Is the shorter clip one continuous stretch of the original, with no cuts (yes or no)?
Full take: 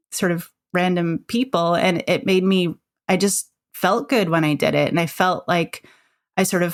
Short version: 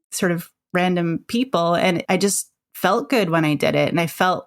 no